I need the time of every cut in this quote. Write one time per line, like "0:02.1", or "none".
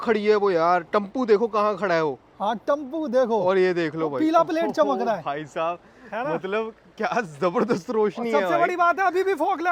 none